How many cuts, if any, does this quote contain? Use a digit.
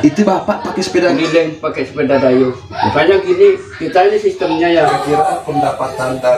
1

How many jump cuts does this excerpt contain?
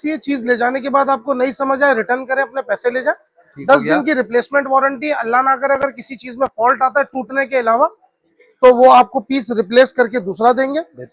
0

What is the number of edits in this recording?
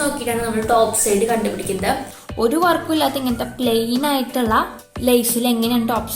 2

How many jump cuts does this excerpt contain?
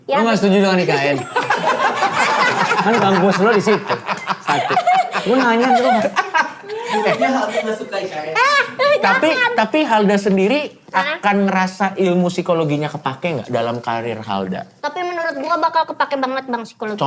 0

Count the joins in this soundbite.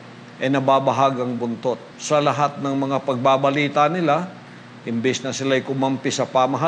1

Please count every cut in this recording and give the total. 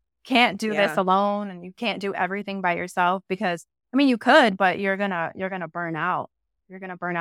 0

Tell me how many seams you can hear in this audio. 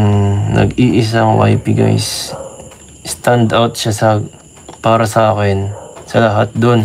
0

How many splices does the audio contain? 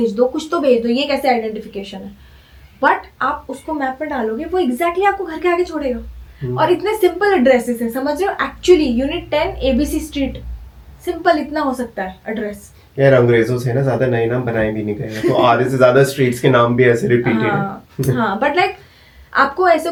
0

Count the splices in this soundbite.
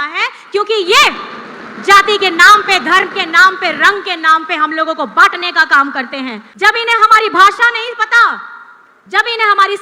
1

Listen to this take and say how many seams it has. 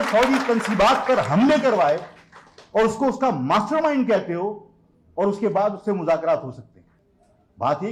0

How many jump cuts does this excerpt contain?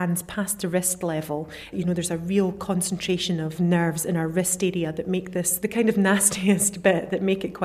3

